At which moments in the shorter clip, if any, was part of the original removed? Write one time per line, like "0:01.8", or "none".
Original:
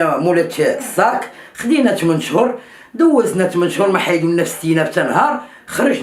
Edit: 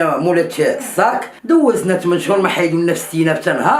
0:01.3